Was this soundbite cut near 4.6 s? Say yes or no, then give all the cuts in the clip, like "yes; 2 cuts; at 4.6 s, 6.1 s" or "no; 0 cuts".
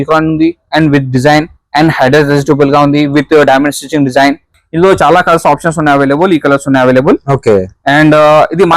yes; 1 cut; at 4.6 s